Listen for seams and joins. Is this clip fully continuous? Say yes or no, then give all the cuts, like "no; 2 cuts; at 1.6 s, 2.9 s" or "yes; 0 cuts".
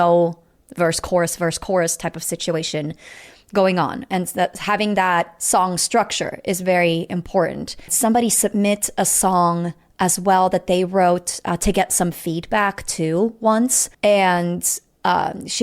no; 2 cuts; at 7.9 s, 13.9 s